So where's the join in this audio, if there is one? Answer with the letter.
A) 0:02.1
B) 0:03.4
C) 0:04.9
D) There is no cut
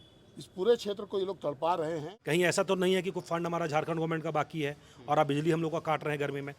A